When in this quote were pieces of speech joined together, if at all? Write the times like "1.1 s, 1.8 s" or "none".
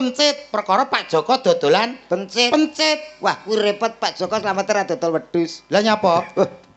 none